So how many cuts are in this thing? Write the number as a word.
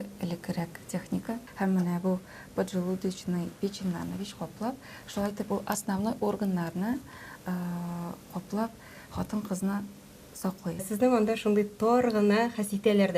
two